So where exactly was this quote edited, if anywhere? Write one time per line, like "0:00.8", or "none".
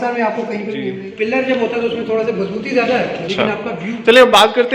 0:00.9
0:03.3